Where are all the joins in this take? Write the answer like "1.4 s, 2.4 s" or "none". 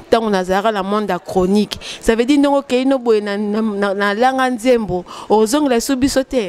none